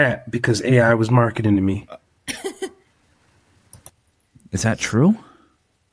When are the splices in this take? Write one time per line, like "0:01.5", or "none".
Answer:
none